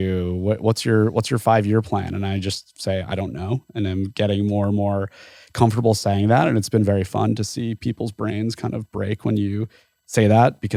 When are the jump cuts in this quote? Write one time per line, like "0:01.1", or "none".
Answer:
none